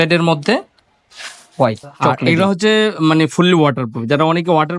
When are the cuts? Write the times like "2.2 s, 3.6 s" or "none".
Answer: 2.2 s